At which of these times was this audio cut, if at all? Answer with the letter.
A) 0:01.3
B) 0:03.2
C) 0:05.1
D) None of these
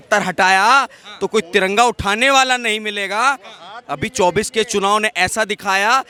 D